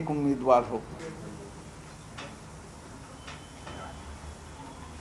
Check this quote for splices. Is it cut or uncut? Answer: uncut